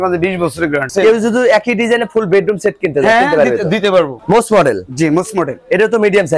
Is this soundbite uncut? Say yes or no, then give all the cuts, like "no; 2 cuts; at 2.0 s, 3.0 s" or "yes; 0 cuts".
no; 2 cuts; at 0.9 s, 4.2 s